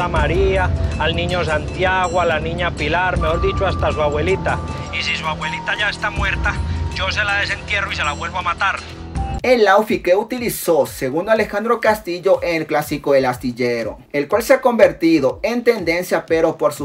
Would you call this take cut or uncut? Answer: uncut